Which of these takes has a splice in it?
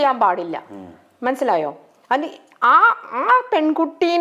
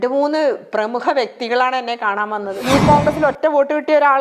second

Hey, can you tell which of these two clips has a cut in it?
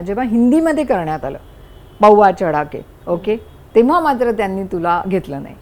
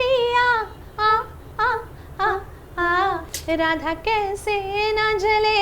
second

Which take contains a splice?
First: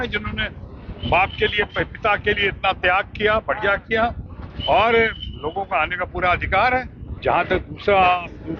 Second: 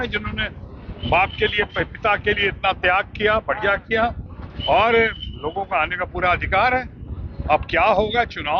first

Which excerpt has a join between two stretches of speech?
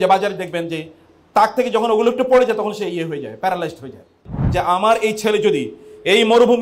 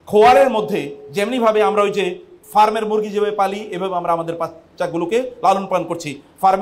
first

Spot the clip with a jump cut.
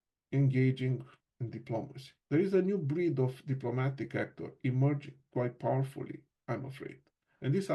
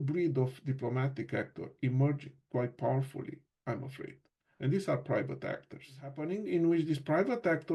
second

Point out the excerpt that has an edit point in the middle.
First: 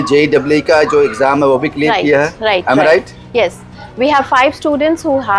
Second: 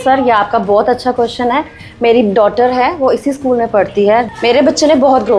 second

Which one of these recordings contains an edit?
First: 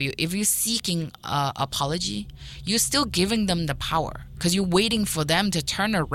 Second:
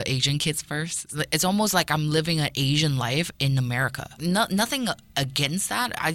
second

